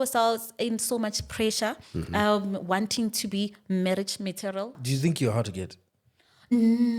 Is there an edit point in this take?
yes; 1 cut; at 4.8 s

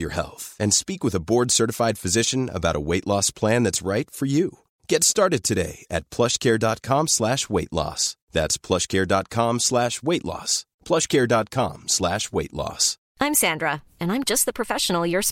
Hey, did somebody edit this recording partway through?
yes; 1 cut; at 13.0 s

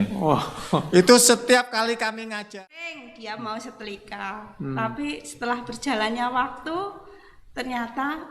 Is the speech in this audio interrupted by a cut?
yes; 1 cut; at 2.3 s

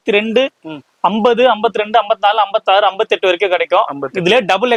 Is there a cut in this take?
no; 0 cuts

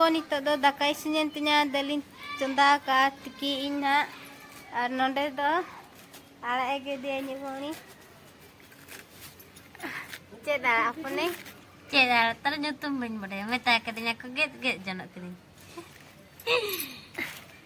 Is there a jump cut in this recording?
no; 0 cuts

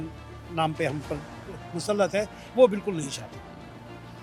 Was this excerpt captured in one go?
yes; 0 cuts

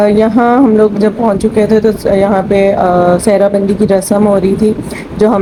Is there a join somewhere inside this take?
no; 0 cuts

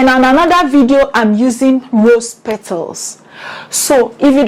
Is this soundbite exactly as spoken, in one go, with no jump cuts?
yes; 0 cuts

